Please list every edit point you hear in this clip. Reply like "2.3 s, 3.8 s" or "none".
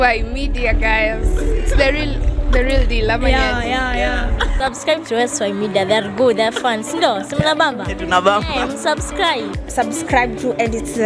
none